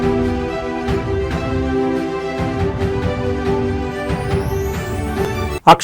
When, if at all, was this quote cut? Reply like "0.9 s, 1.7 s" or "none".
none